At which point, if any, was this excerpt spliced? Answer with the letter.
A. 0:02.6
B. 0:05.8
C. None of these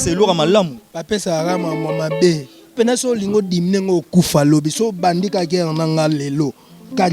A